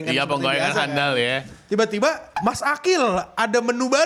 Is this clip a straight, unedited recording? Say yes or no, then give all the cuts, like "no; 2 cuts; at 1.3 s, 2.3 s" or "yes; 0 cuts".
yes; 0 cuts